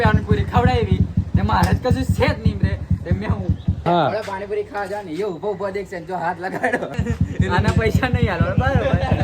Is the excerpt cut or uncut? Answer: cut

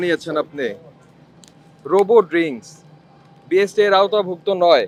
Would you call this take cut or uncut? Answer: uncut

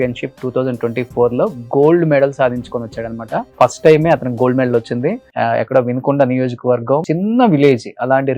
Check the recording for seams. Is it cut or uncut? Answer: cut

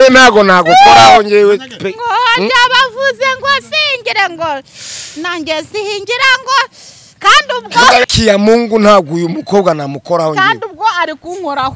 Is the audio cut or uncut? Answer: cut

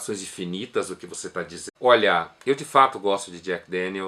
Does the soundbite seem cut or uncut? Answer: uncut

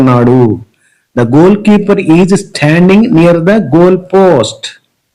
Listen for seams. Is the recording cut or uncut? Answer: uncut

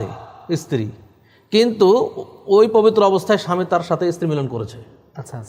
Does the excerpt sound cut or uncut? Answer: uncut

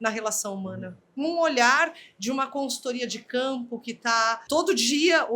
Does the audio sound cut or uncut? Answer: cut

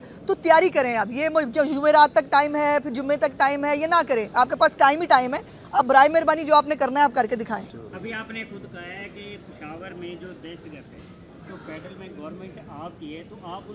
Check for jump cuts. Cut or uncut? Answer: cut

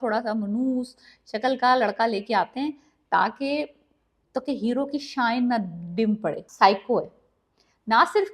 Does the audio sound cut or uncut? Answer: cut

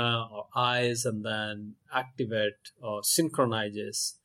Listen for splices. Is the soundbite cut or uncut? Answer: uncut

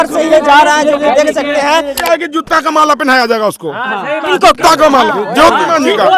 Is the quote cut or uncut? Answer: cut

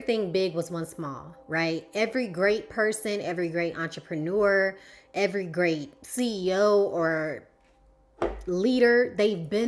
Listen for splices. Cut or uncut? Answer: uncut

